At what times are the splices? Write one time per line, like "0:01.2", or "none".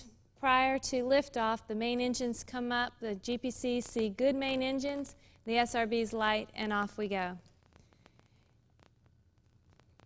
0:03.9